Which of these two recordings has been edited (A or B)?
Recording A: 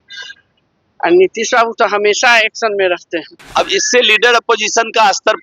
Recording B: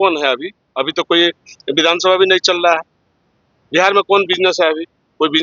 A